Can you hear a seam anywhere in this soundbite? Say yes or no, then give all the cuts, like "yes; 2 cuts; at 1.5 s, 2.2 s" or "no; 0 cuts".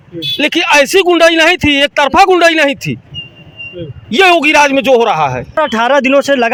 no; 0 cuts